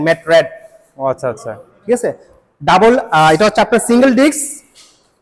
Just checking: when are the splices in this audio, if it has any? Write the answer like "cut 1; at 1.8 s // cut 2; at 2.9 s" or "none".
none